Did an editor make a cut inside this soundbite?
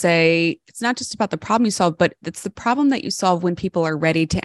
no; 0 cuts

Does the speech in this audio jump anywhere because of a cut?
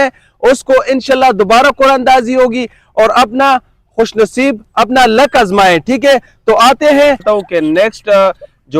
yes; 1 cut; at 7.2 s

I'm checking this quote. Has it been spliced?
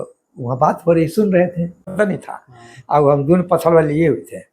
yes; 1 cut; at 1.9 s

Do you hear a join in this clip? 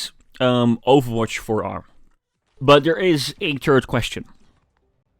yes; 1 cut; at 2.5 s

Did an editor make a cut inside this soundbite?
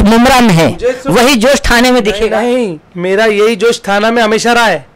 yes; 1 cut; at 2.9 s

